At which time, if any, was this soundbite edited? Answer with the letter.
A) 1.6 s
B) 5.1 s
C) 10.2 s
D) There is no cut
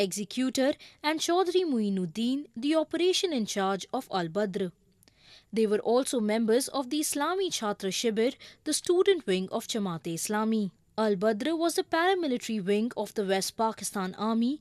A